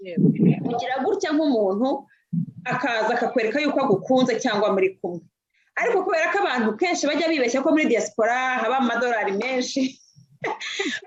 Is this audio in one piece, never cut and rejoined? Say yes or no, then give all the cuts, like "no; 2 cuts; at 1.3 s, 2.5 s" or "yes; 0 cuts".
yes; 0 cuts